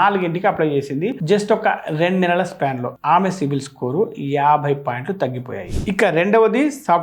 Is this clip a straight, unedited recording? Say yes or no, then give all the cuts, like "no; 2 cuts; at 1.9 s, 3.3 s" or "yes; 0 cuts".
yes; 0 cuts